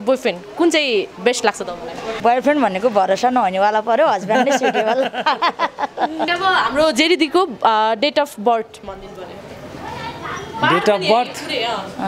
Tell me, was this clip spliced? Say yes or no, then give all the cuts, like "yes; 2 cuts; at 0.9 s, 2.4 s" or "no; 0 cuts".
yes; 2 cuts; at 2.2 s, 6.3 s